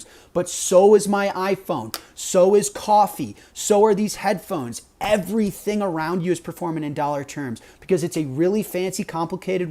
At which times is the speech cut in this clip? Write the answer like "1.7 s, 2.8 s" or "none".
none